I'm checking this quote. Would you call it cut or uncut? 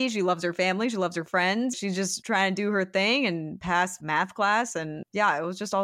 cut